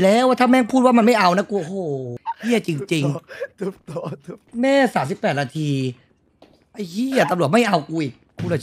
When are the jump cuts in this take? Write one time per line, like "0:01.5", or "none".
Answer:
0:02.1
0:04.5